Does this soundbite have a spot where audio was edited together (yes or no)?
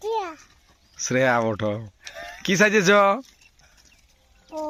no